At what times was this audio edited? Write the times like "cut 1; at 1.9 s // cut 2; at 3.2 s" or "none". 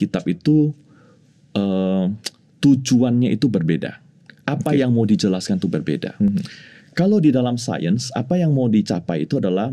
none